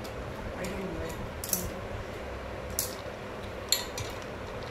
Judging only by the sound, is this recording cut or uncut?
uncut